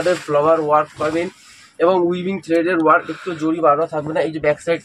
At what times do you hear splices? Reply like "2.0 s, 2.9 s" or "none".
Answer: none